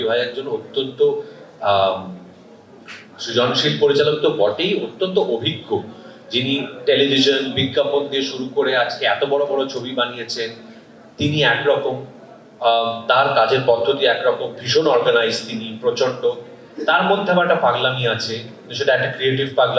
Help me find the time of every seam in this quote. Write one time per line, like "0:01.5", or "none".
none